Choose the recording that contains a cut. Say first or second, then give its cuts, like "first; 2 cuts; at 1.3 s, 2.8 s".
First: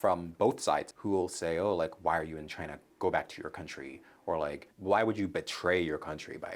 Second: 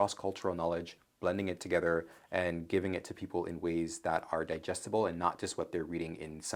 first; 2 cuts; at 0.9 s, 4.7 s